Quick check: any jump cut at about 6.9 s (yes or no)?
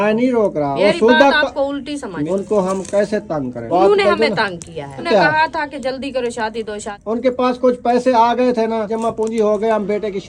yes